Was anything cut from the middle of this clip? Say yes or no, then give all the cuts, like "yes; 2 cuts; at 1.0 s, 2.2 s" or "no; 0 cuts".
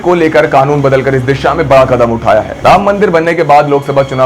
yes; 1 cut; at 2.5 s